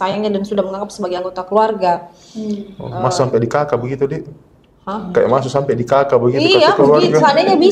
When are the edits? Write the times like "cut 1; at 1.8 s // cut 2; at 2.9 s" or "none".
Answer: none